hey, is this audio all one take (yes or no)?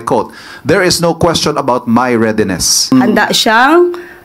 no